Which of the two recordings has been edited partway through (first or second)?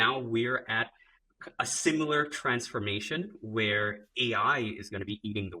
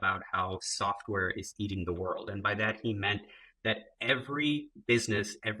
second